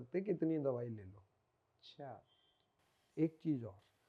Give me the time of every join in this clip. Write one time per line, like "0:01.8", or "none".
none

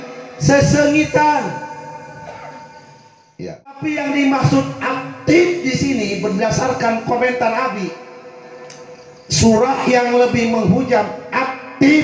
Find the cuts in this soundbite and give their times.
0:03.2

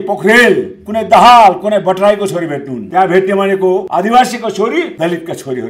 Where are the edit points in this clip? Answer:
0:02.8
0:03.9
0:04.9

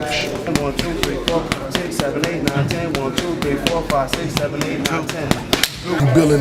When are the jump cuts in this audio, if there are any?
none

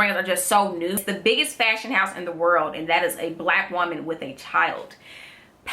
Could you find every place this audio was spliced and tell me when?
0:01.0

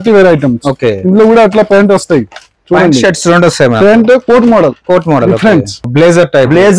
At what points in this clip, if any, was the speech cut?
0:05.8

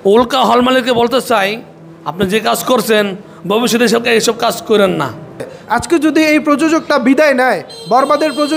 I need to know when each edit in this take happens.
0:05.6

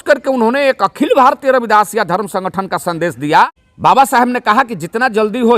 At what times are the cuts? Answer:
0:03.6

